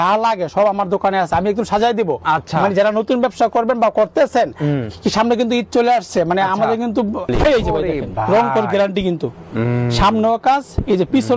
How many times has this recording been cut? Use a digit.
1